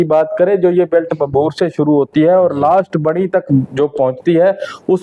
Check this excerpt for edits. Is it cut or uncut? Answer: uncut